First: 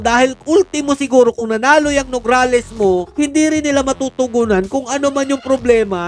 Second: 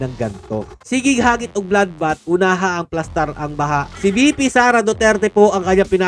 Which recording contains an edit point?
second; 1 cut; at 3.9 s

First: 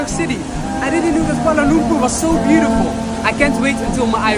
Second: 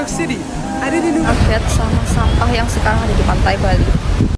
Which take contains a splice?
second; 1 cut; at 1.3 s

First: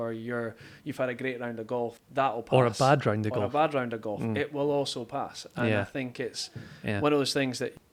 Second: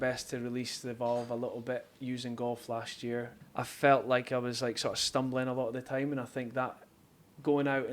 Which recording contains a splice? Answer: second; 1 cut; at 3.4 s

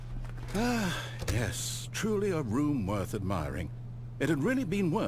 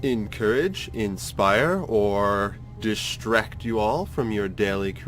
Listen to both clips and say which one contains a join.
second; 1 cut; at 3.1 s

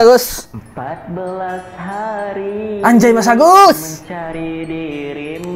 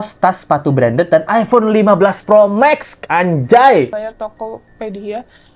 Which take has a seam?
second; 1 cut; at 3.9 s

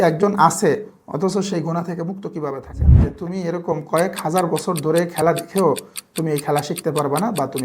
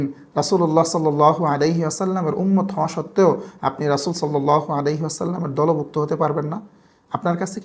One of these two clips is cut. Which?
first; 1 cut; at 3.1 s

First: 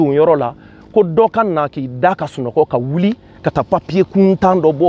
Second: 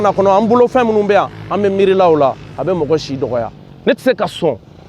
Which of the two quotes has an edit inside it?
second; 1 cut; at 3.5 s

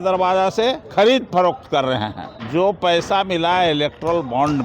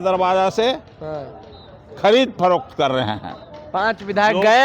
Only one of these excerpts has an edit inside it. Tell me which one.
first; 2 cuts; at 0.8 s, 2.4 s

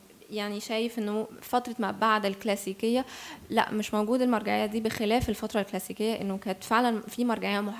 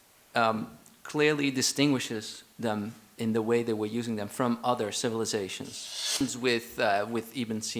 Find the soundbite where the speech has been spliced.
second; 1 cut; at 6.2 s

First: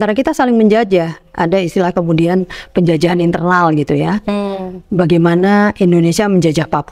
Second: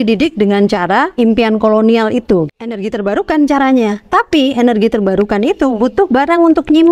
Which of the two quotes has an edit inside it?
second; 2 cuts; at 1.1 s, 2.6 s

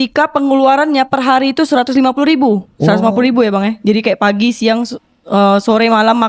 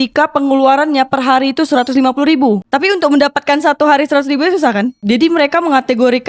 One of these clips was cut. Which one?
second; 2 cuts; at 2.7 s, 5.0 s

